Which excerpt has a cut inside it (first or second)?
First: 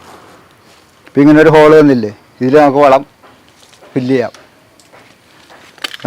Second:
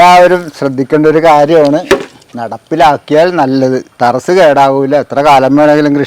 second